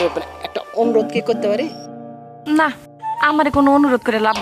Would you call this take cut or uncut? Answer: uncut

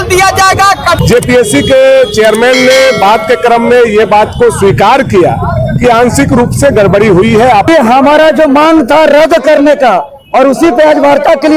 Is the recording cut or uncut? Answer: cut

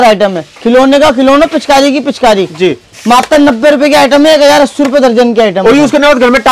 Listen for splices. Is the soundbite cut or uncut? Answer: uncut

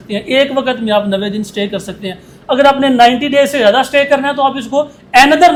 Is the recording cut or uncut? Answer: uncut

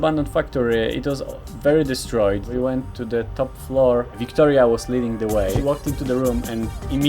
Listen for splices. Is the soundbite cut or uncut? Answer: cut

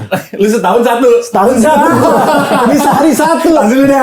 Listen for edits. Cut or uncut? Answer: uncut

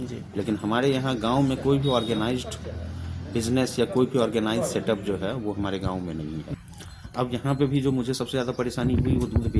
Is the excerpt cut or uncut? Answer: cut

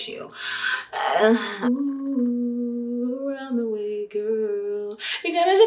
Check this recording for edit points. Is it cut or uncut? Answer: cut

